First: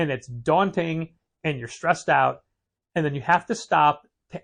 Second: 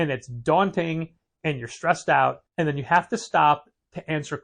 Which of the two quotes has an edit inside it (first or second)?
second